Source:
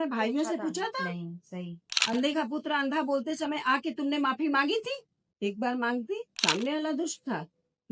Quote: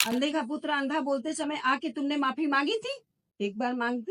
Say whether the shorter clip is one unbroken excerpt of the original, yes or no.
yes